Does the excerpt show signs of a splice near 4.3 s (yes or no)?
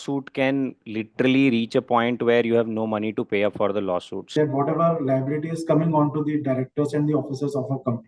yes